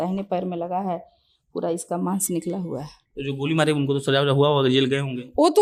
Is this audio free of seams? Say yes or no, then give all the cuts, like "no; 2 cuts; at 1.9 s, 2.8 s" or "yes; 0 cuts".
yes; 0 cuts